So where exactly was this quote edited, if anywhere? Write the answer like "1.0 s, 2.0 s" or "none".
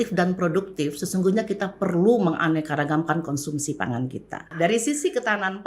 4.5 s

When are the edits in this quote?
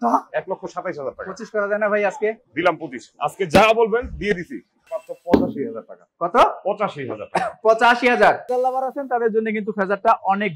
4.9 s, 8.5 s

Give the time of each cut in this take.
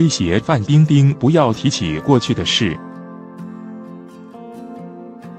3.5 s

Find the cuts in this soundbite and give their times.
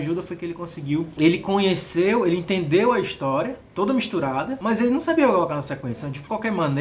1.1 s, 4.5 s

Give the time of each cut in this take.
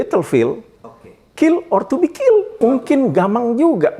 2.6 s

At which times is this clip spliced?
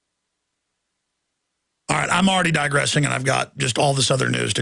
2.5 s

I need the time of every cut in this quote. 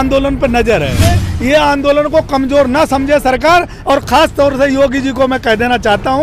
1.2 s

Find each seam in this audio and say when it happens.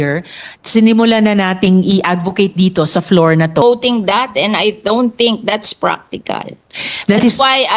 3.6 s

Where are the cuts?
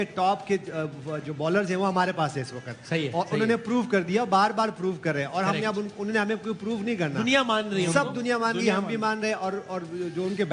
none

